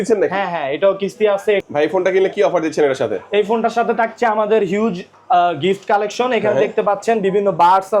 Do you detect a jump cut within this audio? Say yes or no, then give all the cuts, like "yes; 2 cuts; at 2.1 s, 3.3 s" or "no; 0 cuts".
yes; 1 cut; at 1.6 s